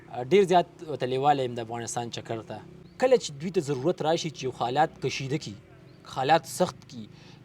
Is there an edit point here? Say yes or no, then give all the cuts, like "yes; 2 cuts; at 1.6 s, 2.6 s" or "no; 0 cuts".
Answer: yes; 1 cut; at 2.8 s